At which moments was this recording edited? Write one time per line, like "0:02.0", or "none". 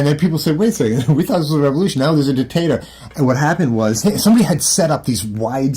0:04.0